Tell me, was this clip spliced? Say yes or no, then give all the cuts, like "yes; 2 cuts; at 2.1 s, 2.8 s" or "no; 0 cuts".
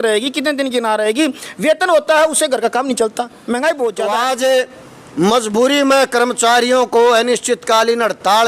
yes; 1 cut; at 4.3 s